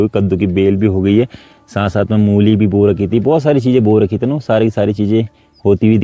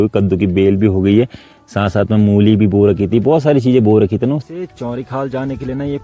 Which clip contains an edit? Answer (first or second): second